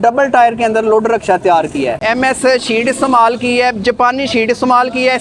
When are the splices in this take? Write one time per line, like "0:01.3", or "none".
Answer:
0:02.0